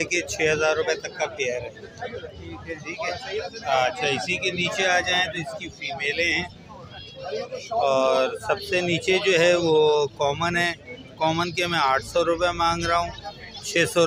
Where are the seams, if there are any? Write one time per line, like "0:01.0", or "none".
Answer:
none